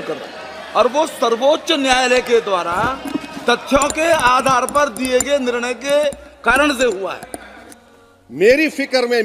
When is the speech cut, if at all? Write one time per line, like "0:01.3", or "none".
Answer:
0:07.6